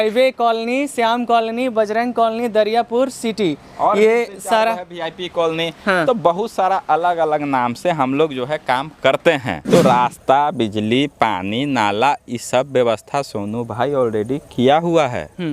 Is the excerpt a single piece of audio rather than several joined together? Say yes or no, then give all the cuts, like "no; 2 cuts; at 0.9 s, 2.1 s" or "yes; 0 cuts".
no; 1 cut; at 9.5 s